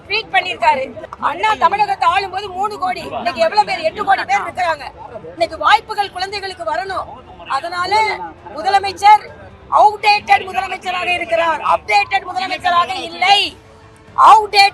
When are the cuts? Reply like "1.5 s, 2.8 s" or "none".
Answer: 1.0 s